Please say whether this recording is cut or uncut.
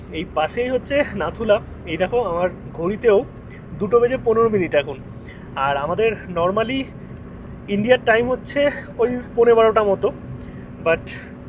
uncut